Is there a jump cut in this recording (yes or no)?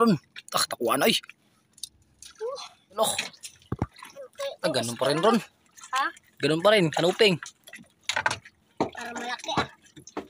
yes